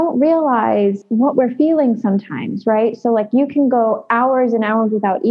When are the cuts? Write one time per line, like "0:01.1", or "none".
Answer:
0:01.0

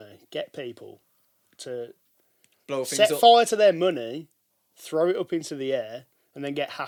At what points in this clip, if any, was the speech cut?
none

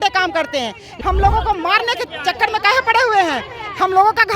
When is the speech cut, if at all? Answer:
0:00.9

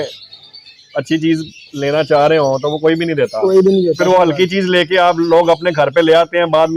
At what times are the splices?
none

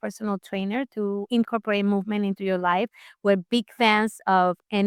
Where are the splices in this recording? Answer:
none

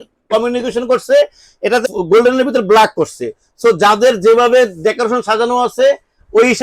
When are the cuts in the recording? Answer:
none

